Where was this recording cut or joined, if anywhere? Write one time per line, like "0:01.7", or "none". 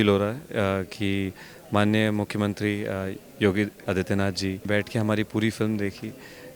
0:04.7